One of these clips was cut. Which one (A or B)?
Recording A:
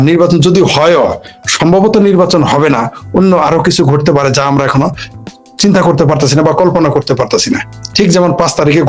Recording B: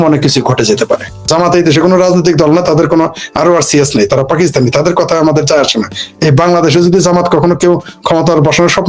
B